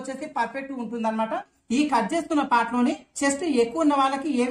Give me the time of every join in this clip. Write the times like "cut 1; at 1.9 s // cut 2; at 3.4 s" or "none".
cut 1; at 1.6 s